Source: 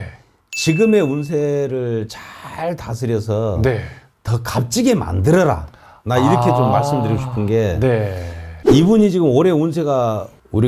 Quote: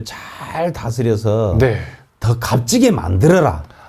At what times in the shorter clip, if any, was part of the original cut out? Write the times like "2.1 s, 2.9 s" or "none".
none